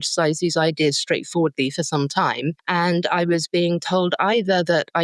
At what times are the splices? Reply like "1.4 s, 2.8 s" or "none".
2.6 s